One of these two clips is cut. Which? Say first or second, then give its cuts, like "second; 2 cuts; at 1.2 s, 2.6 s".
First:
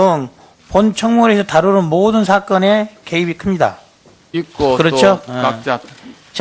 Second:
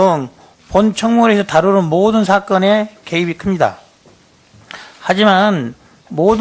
second; 1 cut; at 4.4 s